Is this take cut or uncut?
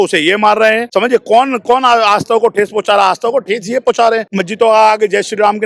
cut